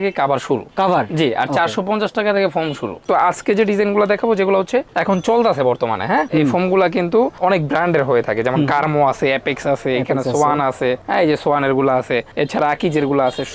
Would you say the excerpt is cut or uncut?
cut